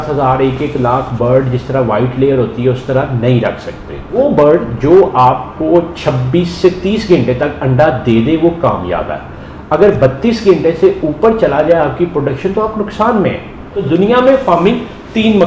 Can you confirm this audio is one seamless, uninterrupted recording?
no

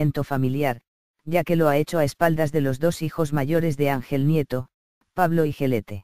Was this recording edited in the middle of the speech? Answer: no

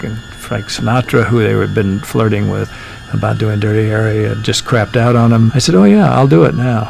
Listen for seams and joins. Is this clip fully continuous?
no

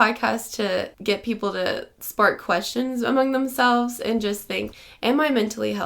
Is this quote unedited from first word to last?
no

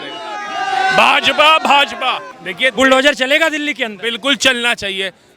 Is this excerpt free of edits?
no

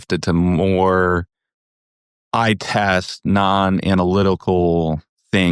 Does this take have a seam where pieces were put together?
no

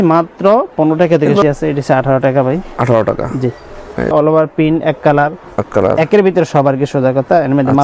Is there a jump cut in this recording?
yes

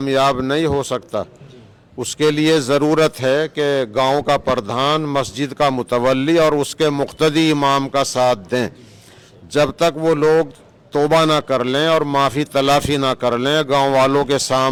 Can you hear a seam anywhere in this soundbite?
no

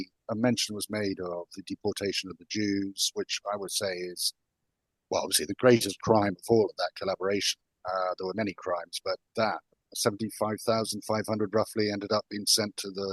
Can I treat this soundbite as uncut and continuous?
yes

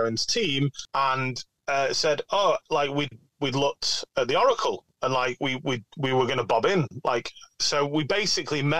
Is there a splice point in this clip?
yes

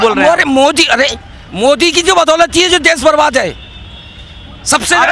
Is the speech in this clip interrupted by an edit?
no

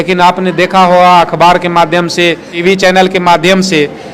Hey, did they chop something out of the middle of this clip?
yes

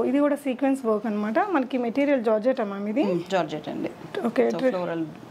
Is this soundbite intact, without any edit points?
yes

